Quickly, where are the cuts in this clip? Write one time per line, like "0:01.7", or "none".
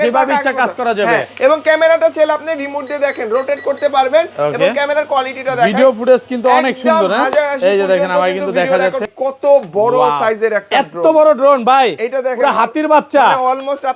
0:09.1